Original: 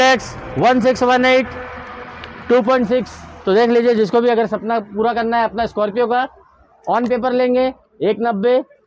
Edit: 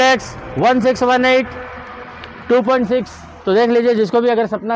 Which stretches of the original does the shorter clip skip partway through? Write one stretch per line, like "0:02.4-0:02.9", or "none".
none